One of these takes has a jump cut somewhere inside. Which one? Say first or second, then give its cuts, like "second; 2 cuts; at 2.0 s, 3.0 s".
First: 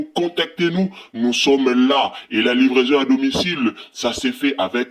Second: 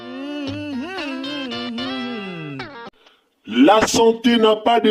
second; 1 cut; at 2.8 s